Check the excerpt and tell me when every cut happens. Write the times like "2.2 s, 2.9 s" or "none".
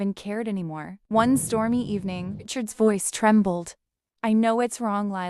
2.5 s